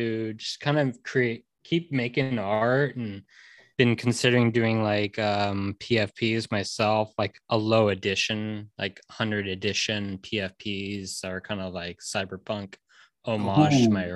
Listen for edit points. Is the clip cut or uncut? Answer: cut